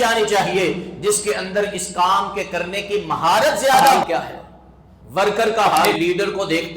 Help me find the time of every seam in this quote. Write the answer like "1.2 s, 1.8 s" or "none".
4.0 s, 5.9 s